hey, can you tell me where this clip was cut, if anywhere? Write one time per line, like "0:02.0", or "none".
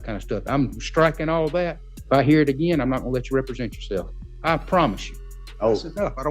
0:01.9
0:04.2
0:05.2